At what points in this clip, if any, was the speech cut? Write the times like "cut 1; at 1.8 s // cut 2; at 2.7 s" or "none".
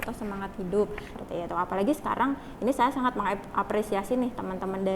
cut 1; at 1.1 s